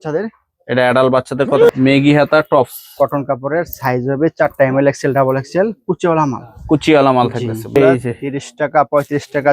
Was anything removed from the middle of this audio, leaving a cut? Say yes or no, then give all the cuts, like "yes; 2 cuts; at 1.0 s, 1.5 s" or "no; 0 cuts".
yes; 2 cuts; at 1.7 s, 7.8 s